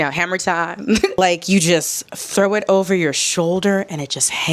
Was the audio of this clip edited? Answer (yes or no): yes